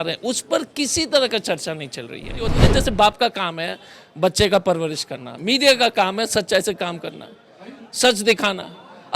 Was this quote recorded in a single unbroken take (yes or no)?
no